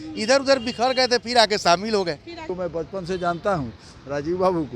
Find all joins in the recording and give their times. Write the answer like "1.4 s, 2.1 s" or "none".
2.4 s